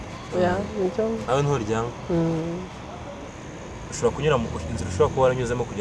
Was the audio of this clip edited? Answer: yes; 1 cut; at 3.2 s

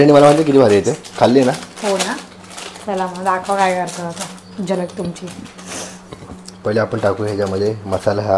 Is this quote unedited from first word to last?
yes; 0 cuts

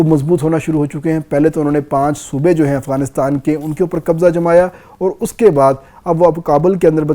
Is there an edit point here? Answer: no; 0 cuts

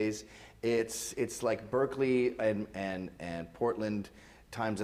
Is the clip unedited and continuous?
yes; 0 cuts

